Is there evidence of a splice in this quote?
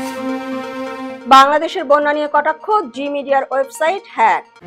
no; 0 cuts

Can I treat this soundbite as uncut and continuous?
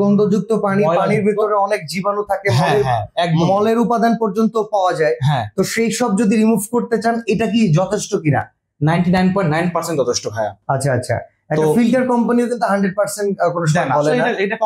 yes; 0 cuts

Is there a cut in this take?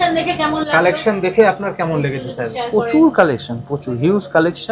no; 0 cuts

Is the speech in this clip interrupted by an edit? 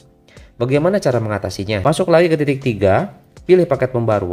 yes; 1 cut; at 1.8 s

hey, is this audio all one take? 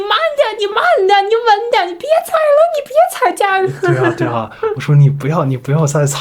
yes; 0 cuts

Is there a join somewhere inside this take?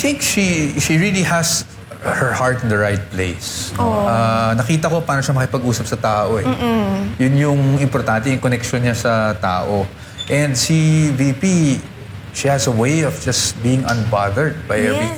no; 0 cuts

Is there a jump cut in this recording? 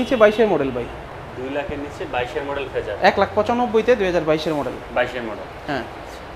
no; 0 cuts

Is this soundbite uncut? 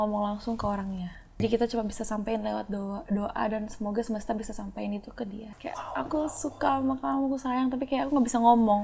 no; 2 cuts; at 1.4 s, 5.5 s

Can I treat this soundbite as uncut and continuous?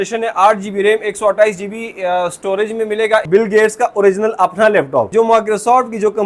no; 2 cuts; at 3.3 s, 5.1 s

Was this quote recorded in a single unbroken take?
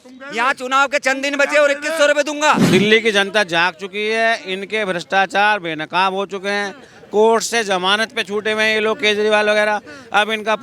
no; 1 cut; at 2.6 s

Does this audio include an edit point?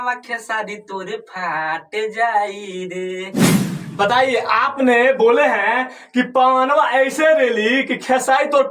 yes; 1 cut; at 3.5 s

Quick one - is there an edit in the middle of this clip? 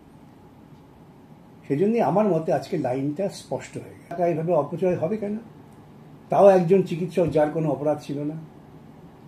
yes; 1 cut; at 4.1 s

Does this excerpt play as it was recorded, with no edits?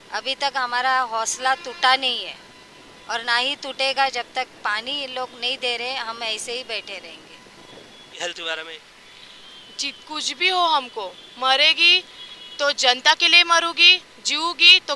no; 1 cut; at 8.2 s

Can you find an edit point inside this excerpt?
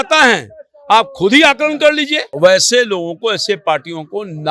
yes; 1 cut; at 2.2 s

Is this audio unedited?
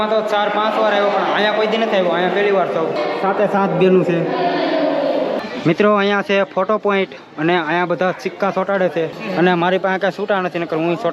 no; 3 cuts; at 3.0 s, 5.4 s, 9.2 s

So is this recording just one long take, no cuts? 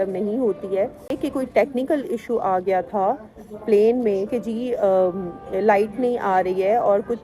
no; 1 cut; at 1.2 s

